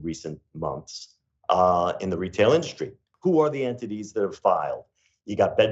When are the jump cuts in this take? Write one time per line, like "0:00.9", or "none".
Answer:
0:03.0